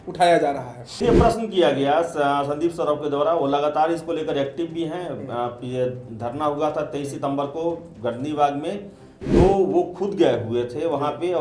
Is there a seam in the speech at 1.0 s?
yes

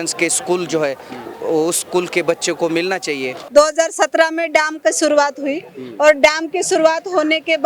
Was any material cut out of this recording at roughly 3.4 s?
yes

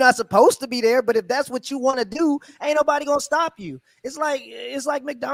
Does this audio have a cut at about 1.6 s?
no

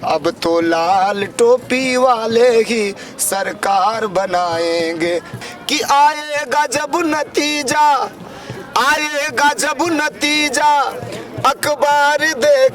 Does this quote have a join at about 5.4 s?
yes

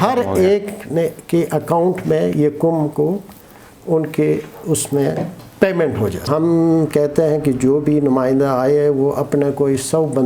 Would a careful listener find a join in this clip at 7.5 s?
no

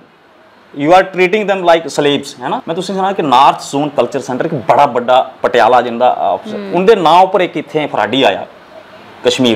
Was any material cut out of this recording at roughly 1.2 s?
no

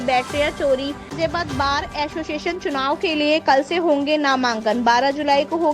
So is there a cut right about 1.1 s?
yes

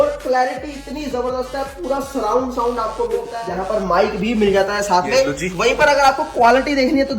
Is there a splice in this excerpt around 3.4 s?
yes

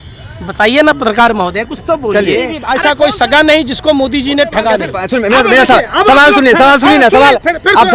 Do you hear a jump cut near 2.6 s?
yes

